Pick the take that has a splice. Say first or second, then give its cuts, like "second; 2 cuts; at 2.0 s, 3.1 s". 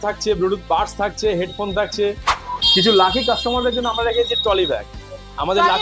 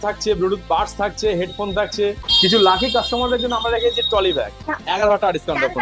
second; 2 cuts; at 2.2 s, 4.7 s